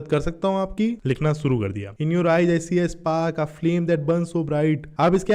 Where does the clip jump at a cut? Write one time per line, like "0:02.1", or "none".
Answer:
none